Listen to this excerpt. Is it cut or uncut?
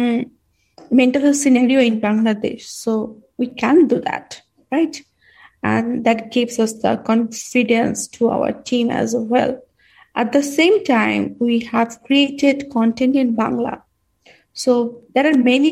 uncut